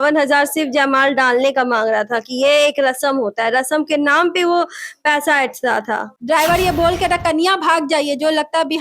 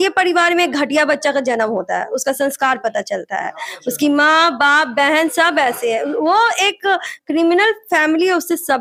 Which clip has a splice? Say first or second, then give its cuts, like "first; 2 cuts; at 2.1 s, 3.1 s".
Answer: first; 1 cut; at 6.1 s